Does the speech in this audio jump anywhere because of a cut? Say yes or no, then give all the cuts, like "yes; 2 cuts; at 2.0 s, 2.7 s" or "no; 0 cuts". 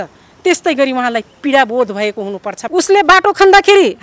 yes; 1 cut; at 2.6 s